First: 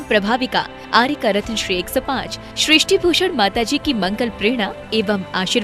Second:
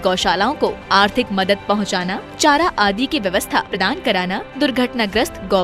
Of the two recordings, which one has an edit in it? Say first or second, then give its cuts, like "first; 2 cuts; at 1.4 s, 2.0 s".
second; 1 cut; at 3.8 s